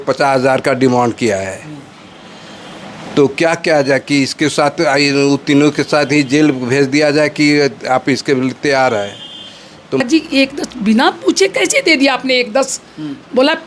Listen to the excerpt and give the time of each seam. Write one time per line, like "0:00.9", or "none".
0:10.0